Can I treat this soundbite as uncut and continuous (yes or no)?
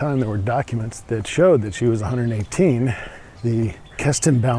no